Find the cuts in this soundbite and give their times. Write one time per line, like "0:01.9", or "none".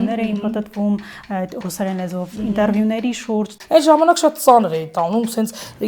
0:03.5